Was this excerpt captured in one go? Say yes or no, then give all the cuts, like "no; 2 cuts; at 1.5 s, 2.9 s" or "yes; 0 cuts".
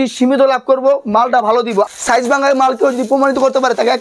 no; 1 cut; at 1.9 s